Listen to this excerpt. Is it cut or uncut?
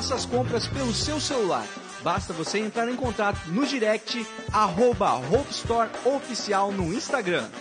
uncut